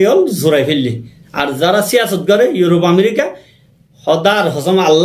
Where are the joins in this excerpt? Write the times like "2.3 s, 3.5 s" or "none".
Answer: 1.2 s